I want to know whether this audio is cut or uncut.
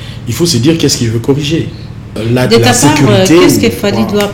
cut